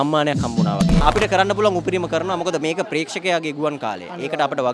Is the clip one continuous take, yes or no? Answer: no